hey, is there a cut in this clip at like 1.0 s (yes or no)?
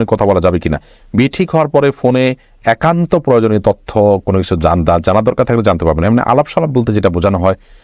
no